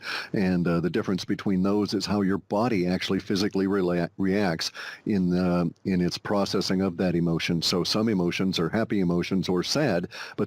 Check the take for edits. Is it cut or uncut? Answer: cut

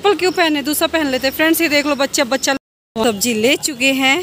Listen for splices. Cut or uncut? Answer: cut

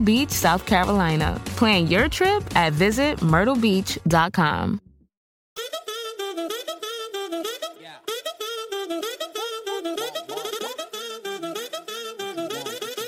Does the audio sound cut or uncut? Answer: cut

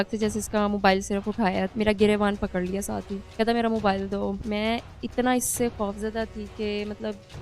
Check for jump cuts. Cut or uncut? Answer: cut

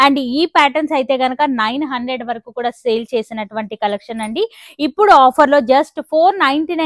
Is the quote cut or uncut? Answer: uncut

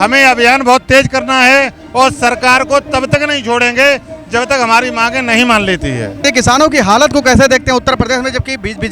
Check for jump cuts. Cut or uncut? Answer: cut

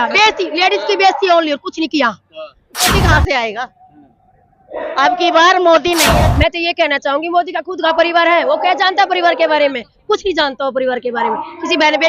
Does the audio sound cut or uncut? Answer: cut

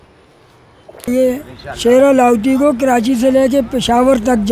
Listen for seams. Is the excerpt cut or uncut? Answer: cut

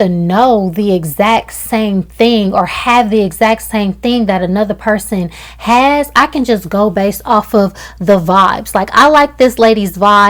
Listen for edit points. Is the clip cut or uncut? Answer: uncut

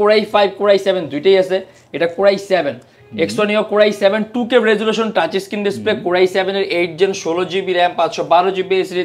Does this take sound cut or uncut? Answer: uncut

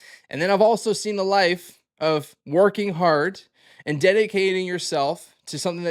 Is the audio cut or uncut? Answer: uncut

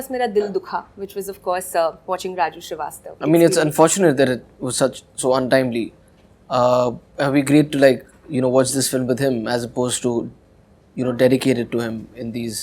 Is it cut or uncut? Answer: cut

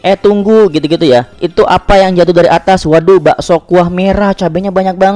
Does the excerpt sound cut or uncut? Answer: uncut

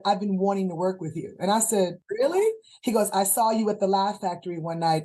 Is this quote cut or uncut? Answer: cut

